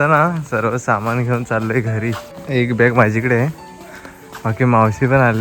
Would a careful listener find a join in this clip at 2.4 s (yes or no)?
yes